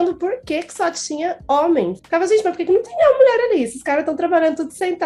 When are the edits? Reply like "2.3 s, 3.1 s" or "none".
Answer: 2.0 s